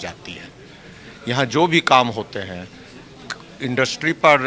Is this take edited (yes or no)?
no